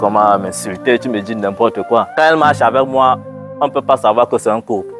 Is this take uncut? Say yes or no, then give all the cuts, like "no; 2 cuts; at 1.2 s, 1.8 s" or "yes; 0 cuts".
no; 1 cut; at 2.1 s